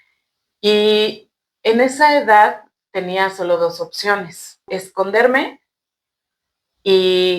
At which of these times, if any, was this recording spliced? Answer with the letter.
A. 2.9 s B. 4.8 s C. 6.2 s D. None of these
B